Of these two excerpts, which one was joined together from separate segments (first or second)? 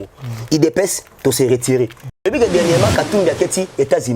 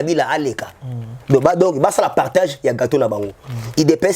first